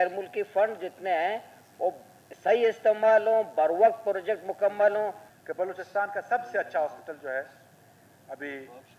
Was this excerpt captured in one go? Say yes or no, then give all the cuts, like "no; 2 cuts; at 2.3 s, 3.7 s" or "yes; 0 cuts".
no; 1 cut; at 5.2 s